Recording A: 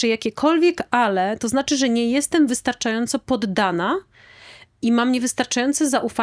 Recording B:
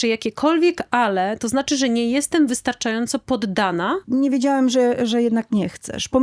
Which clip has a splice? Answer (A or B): B